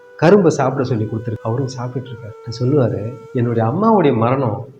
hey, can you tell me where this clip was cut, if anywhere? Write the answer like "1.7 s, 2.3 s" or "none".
1.4 s